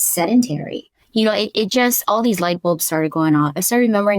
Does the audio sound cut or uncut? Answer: cut